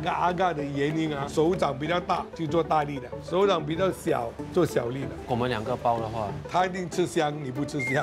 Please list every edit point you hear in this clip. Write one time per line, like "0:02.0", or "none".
0:01.3
0:02.3
0:05.2
0:06.4